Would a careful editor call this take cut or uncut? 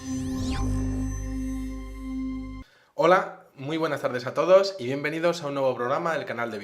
cut